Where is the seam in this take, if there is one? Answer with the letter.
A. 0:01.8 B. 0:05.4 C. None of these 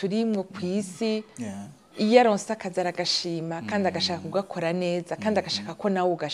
C